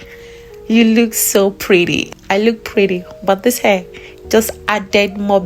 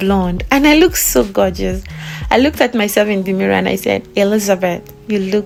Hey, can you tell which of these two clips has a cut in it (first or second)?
first